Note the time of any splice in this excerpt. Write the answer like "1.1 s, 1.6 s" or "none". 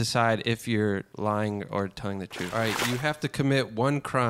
1.1 s, 2.5 s